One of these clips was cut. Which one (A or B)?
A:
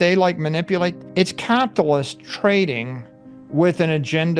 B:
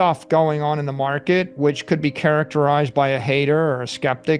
A